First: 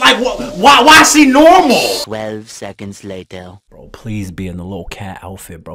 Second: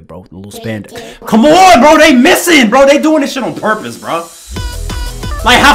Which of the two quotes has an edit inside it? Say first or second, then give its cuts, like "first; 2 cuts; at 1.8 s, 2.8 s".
first; 2 cuts; at 2.0 s, 3.6 s